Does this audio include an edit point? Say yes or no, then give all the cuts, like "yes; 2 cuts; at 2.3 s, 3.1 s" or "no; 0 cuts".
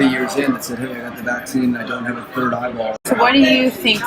yes; 1 cut; at 3.0 s